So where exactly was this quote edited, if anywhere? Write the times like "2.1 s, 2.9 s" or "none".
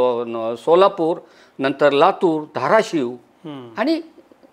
none